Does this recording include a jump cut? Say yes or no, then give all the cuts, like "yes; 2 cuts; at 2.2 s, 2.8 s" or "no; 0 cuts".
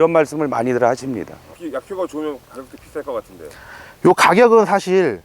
yes; 1 cut; at 1.5 s